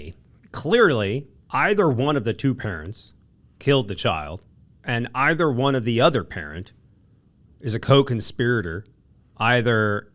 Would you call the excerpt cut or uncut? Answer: cut